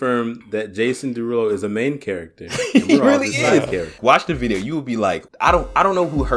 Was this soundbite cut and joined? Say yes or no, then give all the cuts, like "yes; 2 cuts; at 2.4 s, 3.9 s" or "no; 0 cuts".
yes; 2 cuts; at 4.0 s, 5.3 s